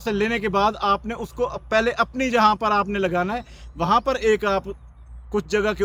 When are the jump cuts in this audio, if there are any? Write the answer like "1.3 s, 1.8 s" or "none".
none